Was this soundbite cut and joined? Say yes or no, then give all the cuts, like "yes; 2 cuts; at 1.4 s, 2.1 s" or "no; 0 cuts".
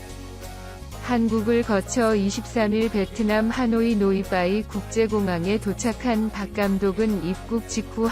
yes; 1 cut; at 1.1 s